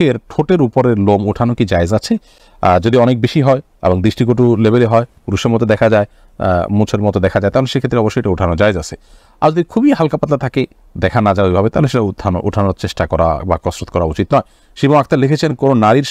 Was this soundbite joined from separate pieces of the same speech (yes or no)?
no